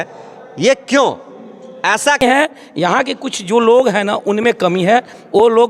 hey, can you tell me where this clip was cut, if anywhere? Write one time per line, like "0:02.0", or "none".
0:02.2